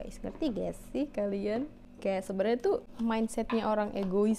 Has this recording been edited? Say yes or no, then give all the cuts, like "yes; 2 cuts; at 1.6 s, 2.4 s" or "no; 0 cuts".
yes; 2 cuts; at 1.8 s, 2.9 s